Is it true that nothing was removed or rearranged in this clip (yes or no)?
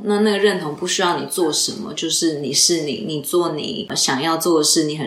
no